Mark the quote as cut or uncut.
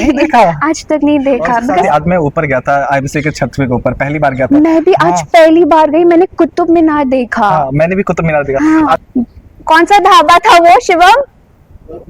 cut